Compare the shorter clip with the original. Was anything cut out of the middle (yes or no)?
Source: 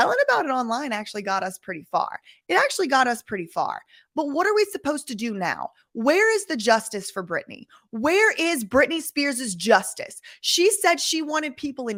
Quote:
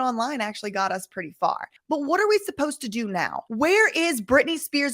yes